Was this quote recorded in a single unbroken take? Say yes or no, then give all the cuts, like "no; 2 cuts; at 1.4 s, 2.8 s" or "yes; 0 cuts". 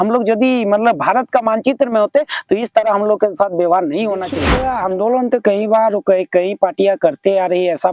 no; 1 cut; at 4.4 s